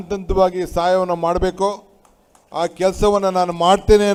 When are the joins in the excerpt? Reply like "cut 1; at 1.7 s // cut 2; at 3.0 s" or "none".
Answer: none